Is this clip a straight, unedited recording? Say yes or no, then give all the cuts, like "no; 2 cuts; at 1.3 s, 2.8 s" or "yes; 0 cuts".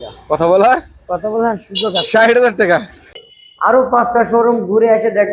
no; 1 cut; at 3.1 s